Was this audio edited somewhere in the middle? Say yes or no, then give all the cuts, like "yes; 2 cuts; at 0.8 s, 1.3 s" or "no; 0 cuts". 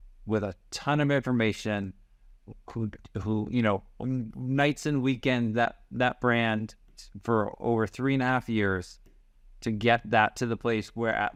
no; 0 cuts